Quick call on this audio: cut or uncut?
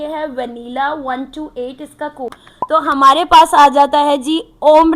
cut